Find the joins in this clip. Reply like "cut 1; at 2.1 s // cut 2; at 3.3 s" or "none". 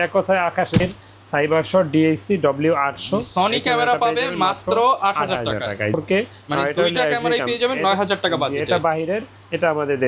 cut 1; at 0.8 s // cut 2; at 5.9 s